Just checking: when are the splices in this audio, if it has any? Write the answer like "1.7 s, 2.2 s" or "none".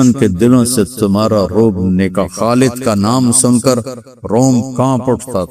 none